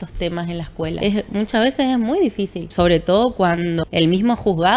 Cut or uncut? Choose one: cut